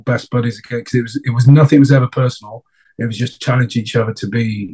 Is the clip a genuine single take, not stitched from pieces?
yes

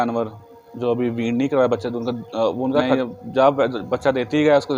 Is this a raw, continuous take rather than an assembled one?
no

